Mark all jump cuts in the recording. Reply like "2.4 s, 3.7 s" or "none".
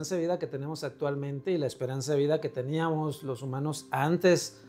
none